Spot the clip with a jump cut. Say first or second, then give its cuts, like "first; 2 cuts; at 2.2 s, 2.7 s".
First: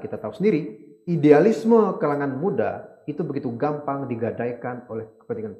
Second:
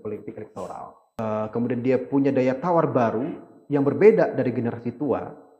second; 1 cut; at 1.2 s